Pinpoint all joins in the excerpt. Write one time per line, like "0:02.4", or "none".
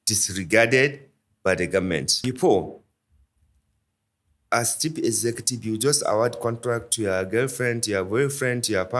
0:02.1